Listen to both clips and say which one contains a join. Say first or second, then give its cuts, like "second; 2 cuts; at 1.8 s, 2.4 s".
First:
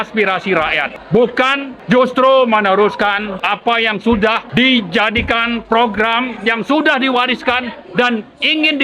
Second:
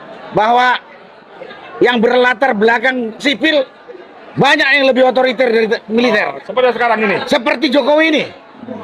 first; 4 cuts; at 0.9 s, 1.7 s, 3.3 s, 4.4 s